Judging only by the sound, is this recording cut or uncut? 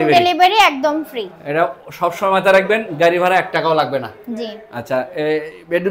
uncut